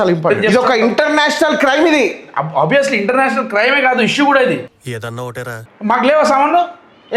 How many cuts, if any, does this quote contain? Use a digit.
1